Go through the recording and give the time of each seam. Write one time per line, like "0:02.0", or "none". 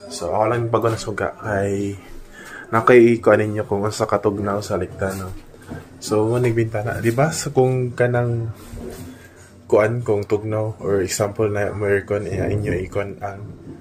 none